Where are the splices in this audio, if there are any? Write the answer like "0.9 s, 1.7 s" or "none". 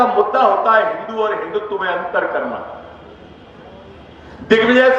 none